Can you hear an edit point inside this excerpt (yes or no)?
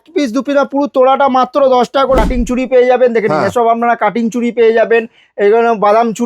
yes